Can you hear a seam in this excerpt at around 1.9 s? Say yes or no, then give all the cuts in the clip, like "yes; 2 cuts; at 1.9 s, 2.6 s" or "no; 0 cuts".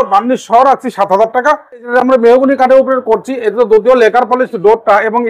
yes; 1 cut; at 1.9 s